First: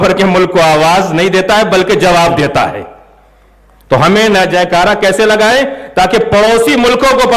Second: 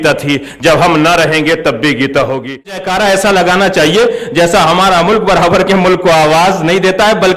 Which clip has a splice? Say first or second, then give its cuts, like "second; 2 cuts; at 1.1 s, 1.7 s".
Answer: second; 1 cut; at 2.8 s